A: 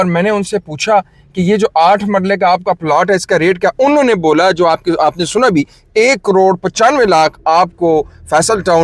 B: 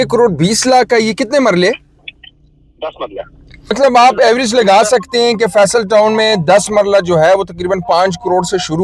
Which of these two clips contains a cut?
B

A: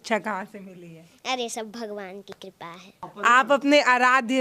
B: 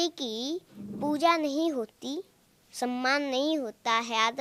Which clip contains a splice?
A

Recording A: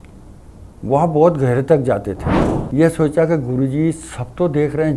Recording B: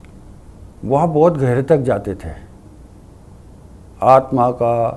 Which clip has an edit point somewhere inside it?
A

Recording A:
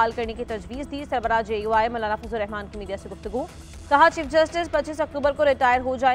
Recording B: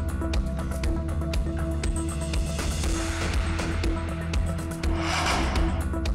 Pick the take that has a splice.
B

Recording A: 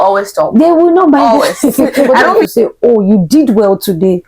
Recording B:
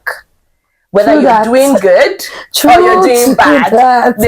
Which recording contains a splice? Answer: A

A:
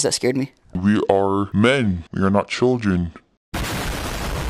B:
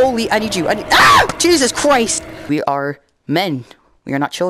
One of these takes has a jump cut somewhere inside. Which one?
B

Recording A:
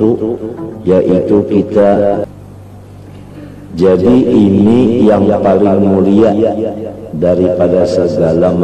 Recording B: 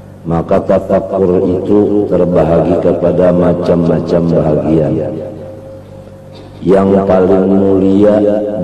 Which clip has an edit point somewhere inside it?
A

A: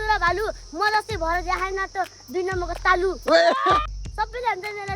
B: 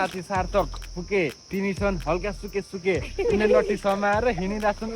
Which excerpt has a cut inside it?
A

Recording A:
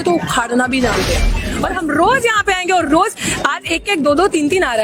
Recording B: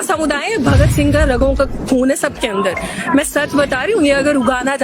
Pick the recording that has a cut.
A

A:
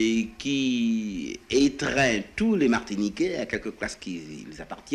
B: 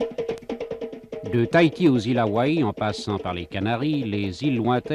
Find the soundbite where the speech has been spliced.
B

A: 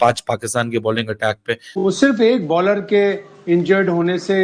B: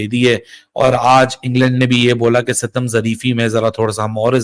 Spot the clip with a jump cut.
A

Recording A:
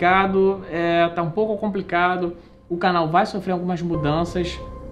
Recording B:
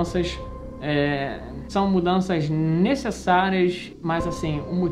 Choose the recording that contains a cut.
B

